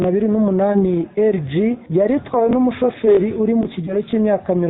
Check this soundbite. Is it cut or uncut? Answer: cut